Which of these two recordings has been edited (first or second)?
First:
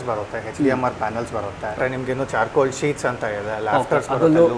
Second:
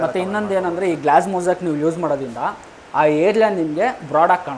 first